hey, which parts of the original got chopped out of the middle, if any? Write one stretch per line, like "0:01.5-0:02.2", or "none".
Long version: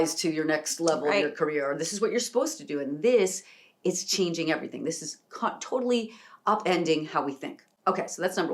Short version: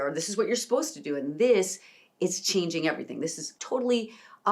0:05.2-0:05.6